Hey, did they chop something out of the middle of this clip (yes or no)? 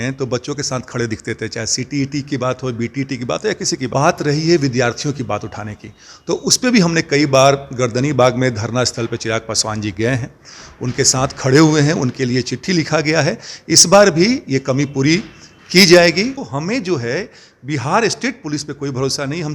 yes